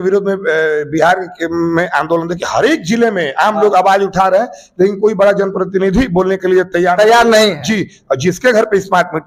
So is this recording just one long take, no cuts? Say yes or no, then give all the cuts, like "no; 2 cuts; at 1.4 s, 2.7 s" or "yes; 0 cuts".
yes; 0 cuts